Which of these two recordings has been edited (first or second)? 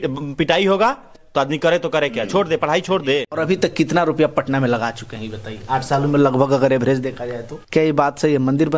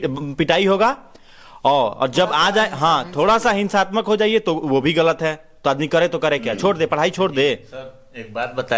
first